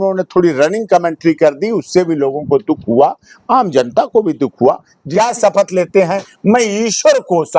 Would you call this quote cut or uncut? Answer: cut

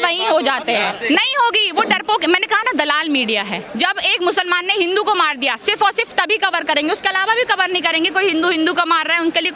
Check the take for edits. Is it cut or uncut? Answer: cut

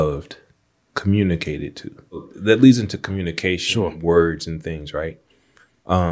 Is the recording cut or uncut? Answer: cut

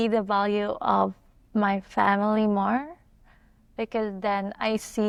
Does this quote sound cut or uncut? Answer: uncut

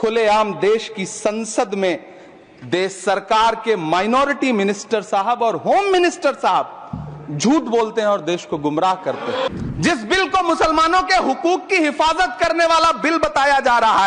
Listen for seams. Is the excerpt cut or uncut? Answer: cut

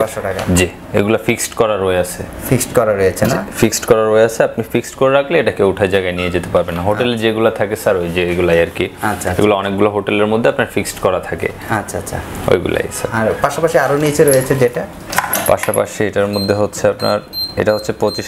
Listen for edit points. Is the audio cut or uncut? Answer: uncut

